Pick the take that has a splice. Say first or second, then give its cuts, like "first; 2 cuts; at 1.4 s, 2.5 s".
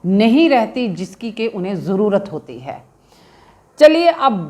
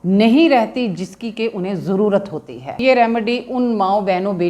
second; 1 cut; at 2.8 s